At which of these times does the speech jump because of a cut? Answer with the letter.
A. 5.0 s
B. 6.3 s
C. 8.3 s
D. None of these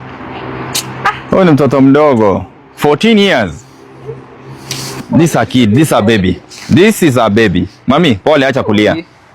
A